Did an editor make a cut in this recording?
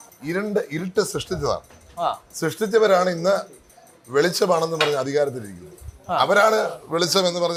no; 0 cuts

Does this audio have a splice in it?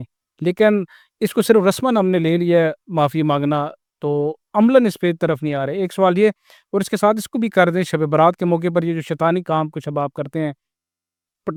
no; 0 cuts

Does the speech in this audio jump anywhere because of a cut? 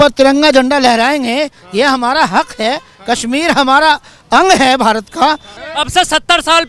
yes; 1 cut; at 5.5 s

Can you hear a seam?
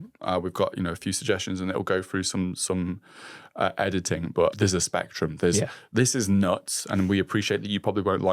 yes; 1 cut; at 4.6 s

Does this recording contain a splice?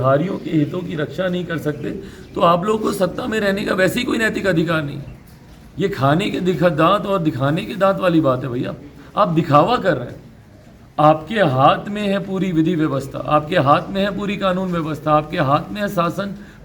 no; 0 cuts

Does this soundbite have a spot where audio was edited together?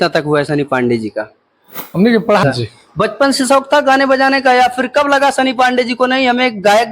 yes; 1 cut; at 2.4 s

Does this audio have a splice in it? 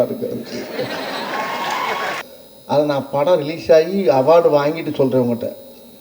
yes; 1 cut; at 2.2 s

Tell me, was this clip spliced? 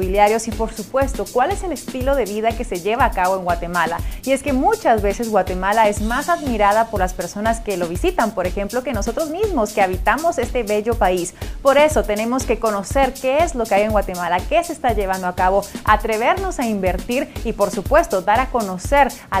no; 0 cuts

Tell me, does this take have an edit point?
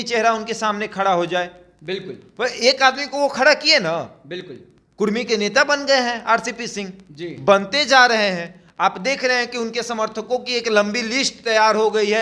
no; 0 cuts

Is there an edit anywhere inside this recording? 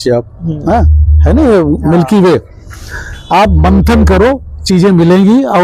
no; 0 cuts

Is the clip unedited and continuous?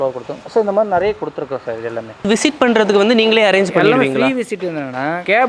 no; 1 cut; at 2.2 s

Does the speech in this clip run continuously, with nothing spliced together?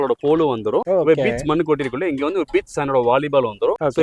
yes; 0 cuts

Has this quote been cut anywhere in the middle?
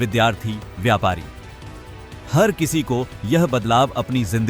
no; 0 cuts

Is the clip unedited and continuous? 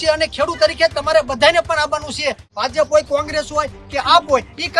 no; 1 cut; at 2.5 s

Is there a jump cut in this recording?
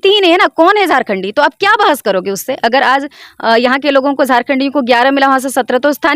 no; 0 cuts

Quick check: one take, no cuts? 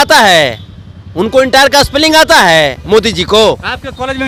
yes; 0 cuts

